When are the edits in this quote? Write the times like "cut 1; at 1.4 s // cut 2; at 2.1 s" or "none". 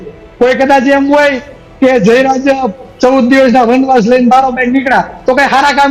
none